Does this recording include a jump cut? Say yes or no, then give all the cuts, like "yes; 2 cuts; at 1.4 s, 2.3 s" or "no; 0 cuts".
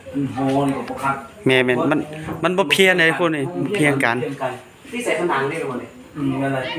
no; 0 cuts